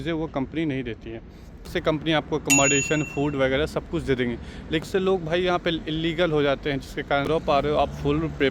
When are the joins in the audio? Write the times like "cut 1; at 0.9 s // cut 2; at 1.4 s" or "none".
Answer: cut 1; at 1.7 s // cut 2; at 4.9 s // cut 3; at 7.3 s

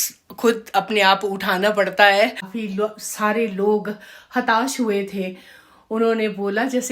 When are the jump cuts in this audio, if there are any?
cut 1; at 2.5 s

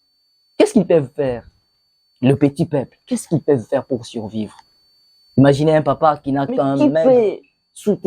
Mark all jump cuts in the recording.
cut 1; at 6.8 s

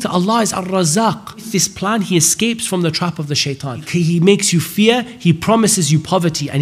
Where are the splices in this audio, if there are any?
cut 1; at 1.5 s // cut 2; at 3.9 s

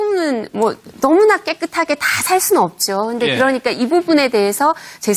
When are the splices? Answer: none

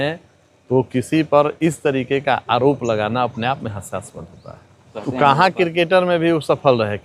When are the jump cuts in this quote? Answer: cut 1; at 4.9 s

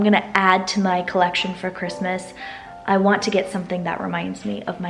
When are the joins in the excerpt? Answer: none

